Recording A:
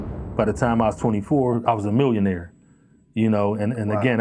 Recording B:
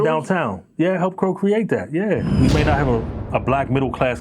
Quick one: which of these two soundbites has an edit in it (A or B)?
B